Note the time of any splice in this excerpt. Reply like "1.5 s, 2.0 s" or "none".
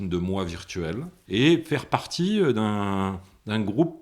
1.1 s